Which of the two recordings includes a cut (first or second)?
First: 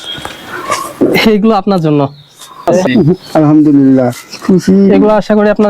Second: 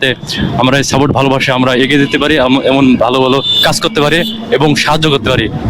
first